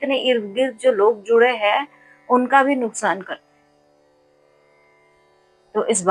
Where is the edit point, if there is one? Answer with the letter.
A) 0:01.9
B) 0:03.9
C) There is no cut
C